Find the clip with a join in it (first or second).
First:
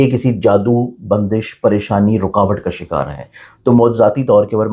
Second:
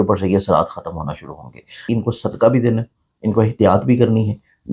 second